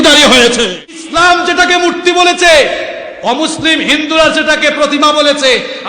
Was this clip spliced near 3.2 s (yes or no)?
no